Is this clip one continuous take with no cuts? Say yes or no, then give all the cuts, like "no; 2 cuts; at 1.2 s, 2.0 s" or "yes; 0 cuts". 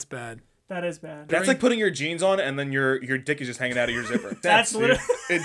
no; 2 cuts; at 1.3 s, 4.4 s